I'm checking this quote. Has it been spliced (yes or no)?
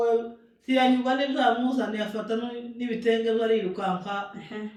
no